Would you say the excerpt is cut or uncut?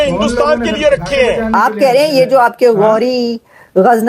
cut